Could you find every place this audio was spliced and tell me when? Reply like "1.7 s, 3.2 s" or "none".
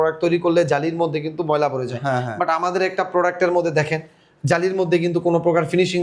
none